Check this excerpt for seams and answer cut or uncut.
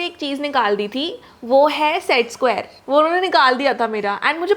uncut